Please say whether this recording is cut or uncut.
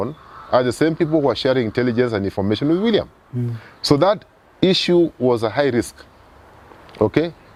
uncut